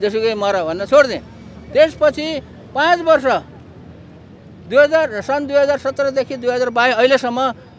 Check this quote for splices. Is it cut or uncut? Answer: uncut